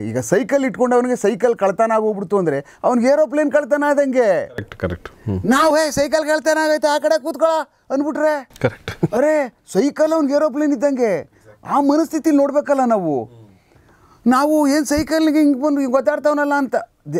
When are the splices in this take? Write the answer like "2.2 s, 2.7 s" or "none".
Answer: none

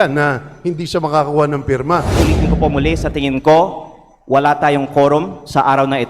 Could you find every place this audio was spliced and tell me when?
2.2 s

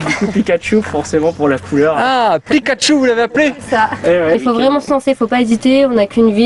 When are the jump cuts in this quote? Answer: 4.4 s

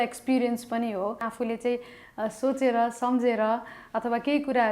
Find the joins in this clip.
1.3 s

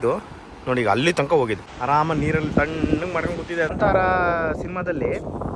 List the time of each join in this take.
1.7 s, 3.7 s

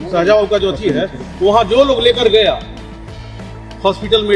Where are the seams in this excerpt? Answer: none

